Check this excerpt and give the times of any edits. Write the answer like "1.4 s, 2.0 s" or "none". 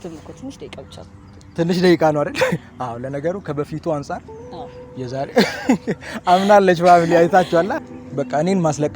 7.7 s